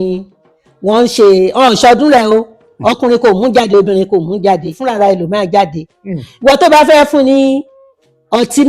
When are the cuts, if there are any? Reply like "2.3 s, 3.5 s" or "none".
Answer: 4.8 s